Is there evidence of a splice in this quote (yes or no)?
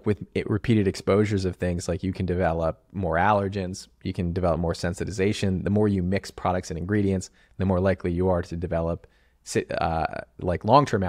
no